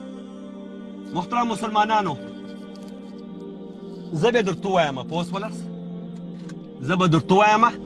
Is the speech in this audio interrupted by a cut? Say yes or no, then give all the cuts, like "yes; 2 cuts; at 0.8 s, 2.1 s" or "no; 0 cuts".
yes; 4 cuts; at 2.3 s, 3.8 s, 5.5 s, 6.8 s